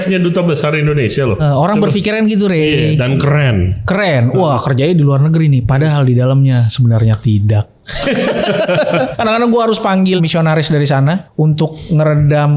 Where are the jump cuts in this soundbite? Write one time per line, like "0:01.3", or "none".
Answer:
0:01.4
0:09.1
0:10.2
0:11.3